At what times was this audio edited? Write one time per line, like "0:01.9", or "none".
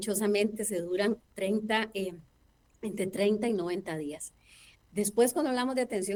none